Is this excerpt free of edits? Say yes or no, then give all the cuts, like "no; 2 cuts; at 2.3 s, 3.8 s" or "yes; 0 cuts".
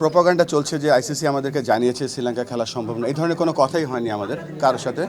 yes; 0 cuts